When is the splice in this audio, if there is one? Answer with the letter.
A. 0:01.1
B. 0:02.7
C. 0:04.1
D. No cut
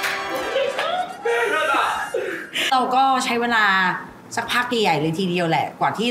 B